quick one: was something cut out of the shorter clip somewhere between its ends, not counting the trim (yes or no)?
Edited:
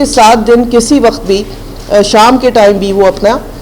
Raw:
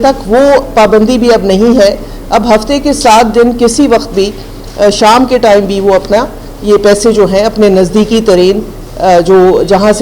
no